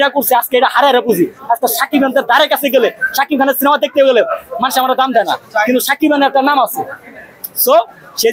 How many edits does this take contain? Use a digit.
0